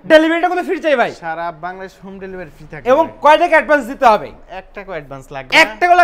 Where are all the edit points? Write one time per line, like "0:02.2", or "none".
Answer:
none